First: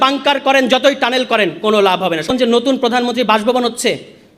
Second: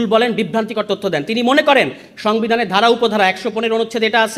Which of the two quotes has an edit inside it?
first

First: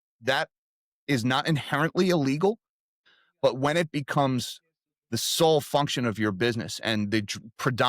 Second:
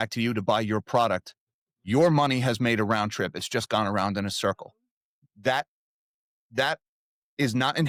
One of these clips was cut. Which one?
first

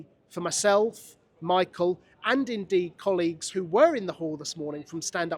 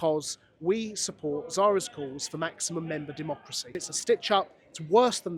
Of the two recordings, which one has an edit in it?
second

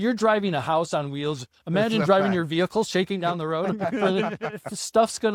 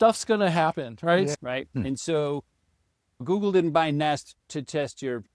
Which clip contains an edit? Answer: second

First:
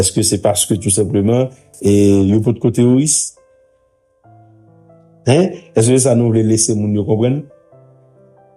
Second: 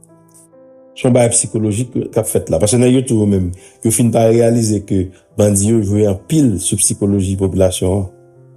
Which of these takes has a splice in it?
second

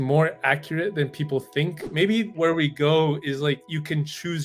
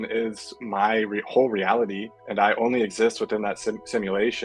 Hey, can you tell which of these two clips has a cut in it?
first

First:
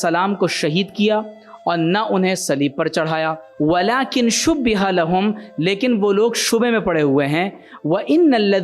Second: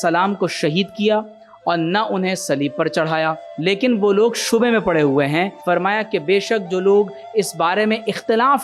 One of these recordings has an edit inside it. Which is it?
second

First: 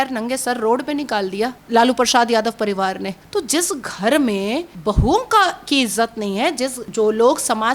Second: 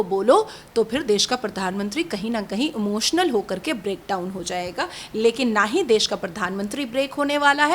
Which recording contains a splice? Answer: first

